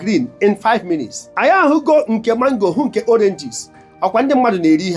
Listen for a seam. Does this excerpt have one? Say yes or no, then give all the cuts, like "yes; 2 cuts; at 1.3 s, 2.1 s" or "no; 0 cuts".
yes; 1 cut; at 1.2 s